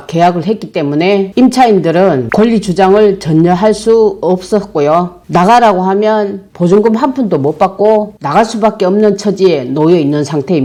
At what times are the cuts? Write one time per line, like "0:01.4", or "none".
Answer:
none